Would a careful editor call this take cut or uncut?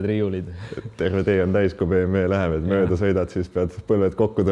uncut